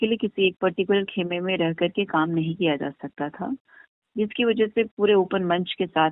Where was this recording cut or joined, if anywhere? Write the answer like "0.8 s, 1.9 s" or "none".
none